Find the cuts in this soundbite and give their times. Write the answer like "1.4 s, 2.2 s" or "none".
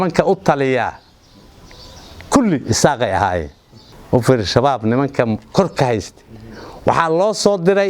none